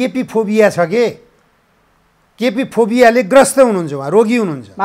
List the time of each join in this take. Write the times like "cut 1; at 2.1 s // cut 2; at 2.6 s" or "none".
none